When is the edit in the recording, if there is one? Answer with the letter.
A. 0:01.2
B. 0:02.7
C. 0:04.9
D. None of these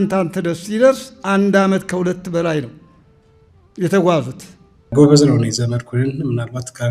C